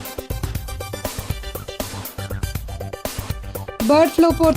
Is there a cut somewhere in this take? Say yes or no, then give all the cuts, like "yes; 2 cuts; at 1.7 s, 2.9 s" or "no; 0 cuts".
no; 0 cuts